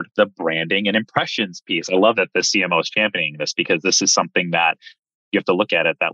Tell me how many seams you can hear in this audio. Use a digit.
0